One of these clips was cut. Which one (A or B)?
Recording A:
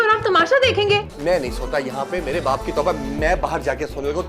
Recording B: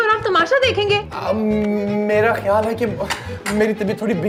A